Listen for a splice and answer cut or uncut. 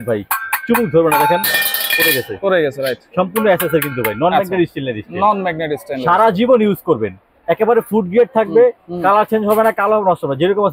uncut